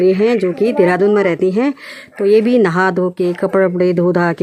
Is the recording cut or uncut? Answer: uncut